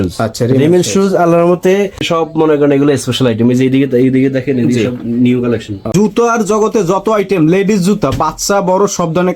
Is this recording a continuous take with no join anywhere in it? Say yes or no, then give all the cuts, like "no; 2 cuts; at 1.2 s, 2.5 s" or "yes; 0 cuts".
no; 2 cuts; at 2.0 s, 5.9 s